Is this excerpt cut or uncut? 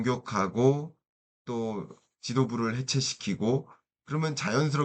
uncut